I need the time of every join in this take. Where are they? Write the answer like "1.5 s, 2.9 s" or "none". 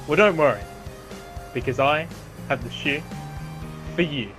none